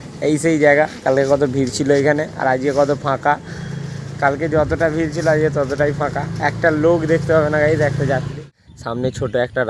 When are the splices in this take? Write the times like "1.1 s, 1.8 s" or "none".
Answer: 8.4 s